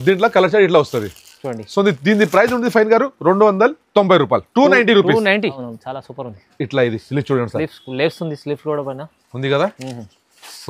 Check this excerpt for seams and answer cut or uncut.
cut